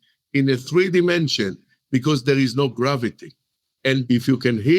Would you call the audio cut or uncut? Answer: cut